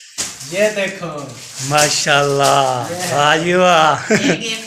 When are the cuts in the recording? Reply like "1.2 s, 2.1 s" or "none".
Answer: none